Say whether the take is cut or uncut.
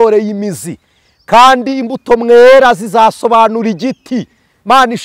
uncut